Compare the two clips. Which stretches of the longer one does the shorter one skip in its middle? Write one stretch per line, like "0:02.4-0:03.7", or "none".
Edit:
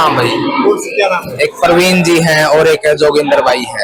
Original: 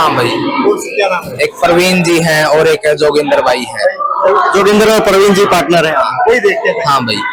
none